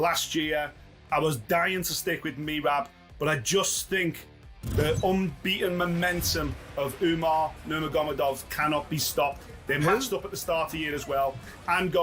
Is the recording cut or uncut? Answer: uncut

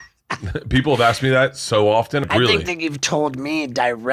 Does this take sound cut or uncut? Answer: cut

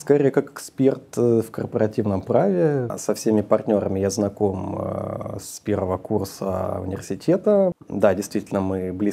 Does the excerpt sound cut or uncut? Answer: cut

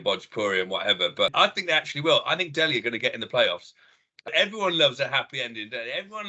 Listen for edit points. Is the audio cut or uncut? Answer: cut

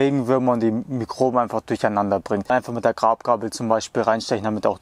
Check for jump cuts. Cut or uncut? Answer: cut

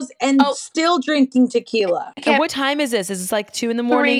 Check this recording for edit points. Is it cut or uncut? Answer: cut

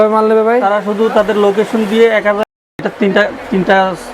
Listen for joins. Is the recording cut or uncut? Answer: cut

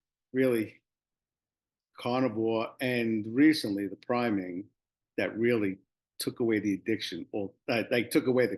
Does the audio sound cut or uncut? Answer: uncut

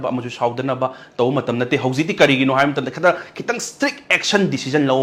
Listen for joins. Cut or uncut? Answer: uncut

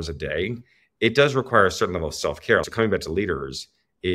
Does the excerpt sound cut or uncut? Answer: cut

